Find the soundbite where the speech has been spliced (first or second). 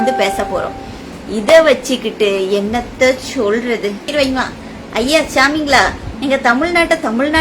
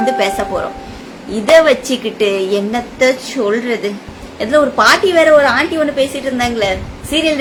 first